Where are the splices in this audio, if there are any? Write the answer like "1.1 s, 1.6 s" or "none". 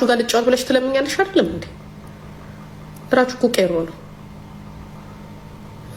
none